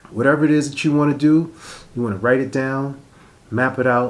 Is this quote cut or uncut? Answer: uncut